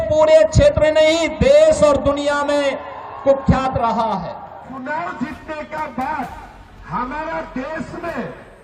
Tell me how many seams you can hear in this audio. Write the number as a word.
one